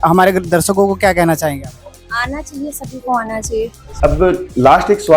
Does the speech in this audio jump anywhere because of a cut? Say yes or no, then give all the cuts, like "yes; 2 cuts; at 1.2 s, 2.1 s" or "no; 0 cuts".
yes; 1 cut; at 3.9 s